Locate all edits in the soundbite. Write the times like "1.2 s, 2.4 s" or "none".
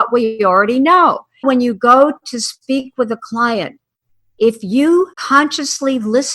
1.4 s, 5.2 s